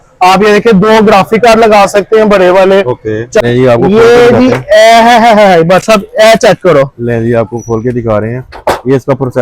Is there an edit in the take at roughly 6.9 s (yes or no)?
no